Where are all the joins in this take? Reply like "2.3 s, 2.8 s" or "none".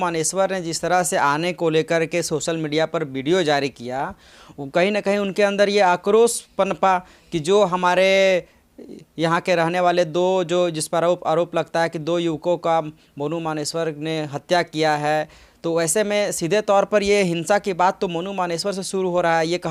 none